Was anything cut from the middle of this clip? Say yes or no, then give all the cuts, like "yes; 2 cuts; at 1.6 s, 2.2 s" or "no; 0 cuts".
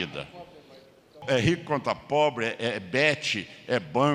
yes; 1 cut; at 1.2 s